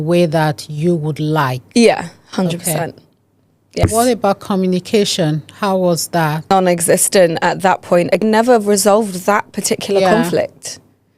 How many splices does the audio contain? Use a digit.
3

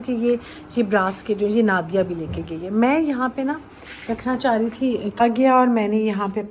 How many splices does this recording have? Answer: 1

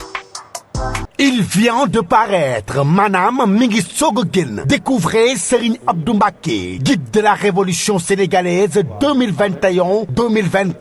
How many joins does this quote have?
1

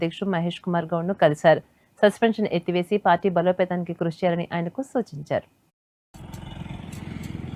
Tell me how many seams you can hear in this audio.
0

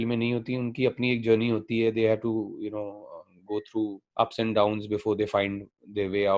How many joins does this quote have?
1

